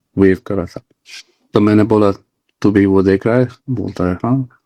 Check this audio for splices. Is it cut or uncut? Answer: uncut